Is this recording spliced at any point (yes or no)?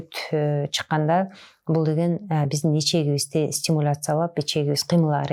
no